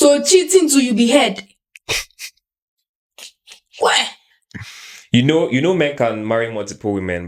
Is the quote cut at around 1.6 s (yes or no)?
no